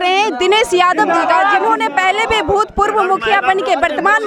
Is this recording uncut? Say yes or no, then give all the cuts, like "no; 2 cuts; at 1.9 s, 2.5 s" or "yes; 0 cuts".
yes; 0 cuts